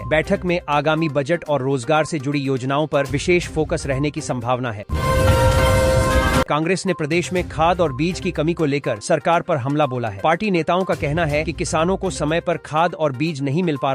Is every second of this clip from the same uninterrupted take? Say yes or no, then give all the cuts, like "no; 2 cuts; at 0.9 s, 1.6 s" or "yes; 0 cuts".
no; 2 cuts; at 4.6 s, 6.5 s